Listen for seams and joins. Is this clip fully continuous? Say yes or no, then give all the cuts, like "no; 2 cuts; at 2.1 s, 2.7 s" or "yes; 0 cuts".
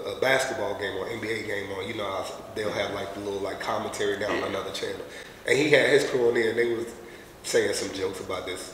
yes; 0 cuts